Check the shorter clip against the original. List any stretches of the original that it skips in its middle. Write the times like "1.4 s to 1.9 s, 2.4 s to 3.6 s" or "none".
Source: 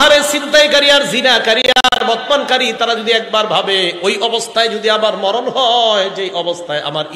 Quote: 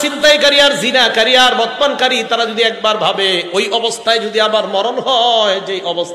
1.6 s to 1.8 s